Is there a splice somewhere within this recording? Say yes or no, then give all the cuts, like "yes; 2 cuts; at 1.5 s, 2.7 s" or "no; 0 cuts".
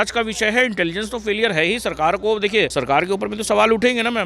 yes; 1 cut; at 2.7 s